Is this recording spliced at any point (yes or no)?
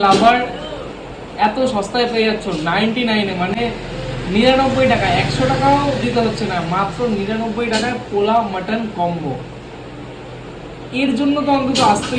no